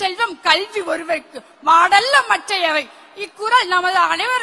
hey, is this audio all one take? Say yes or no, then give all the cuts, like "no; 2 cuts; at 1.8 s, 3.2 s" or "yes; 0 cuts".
yes; 0 cuts